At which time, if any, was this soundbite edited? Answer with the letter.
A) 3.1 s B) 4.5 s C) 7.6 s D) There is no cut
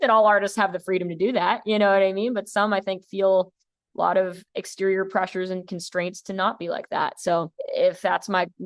C